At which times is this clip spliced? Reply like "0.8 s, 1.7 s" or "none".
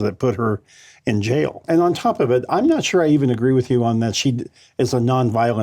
1.6 s